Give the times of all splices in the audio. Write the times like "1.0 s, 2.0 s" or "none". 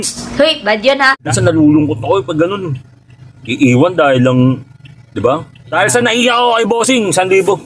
1.2 s